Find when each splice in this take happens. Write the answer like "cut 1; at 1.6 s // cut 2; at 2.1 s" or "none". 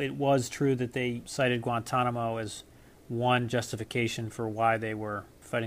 cut 1; at 1.2 s